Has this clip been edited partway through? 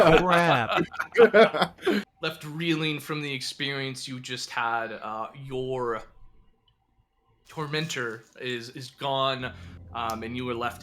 yes; 1 cut; at 2.1 s

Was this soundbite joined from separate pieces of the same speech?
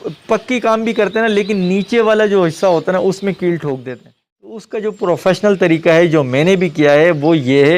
yes; 1 cut; at 4.7 s

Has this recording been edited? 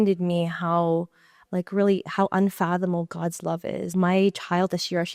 yes; 1 cut; at 3.9 s

